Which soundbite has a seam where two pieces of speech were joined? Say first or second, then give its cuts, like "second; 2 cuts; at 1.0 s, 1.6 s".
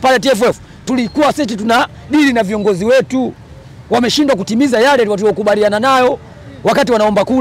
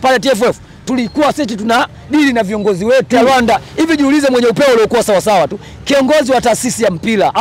second; 1 cut; at 3.1 s